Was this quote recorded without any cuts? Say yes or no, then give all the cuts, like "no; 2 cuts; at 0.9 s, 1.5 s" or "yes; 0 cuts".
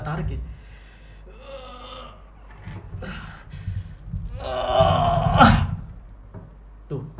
yes; 0 cuts